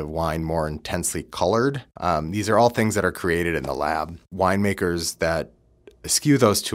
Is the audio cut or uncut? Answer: cut